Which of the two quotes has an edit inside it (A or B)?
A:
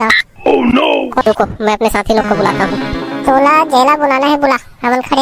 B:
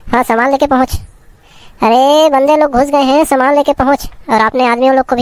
A